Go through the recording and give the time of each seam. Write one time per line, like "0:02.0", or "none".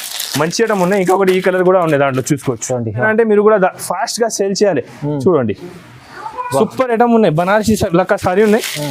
0:03.0